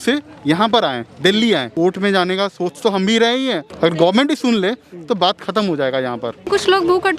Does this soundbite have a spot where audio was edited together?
yes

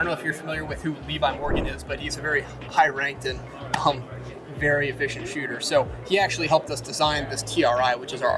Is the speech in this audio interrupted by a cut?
no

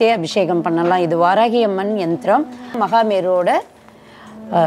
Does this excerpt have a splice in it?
yes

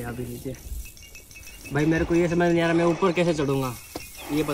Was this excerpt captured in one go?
yes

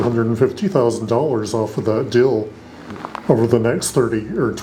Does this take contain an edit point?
no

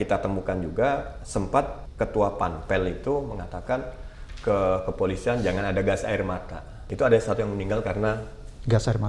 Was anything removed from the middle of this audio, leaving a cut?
yes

